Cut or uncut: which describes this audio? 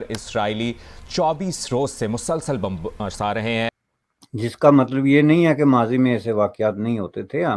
cut